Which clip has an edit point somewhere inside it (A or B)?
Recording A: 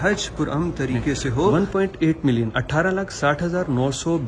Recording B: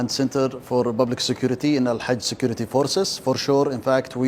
A